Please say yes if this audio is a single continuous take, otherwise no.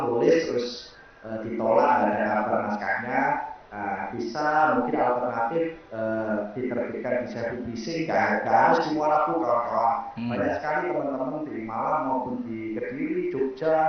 yes